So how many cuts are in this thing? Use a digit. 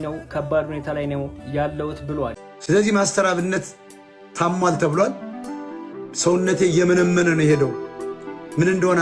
1